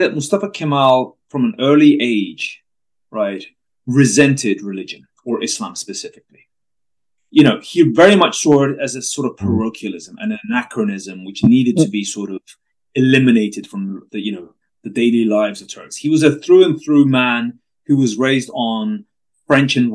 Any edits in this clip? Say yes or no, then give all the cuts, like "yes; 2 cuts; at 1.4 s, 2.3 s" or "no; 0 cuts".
no; 0 cuts